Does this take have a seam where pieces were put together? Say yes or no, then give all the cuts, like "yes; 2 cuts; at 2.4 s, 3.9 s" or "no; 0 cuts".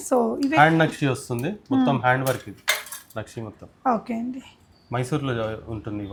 no; 0 cuts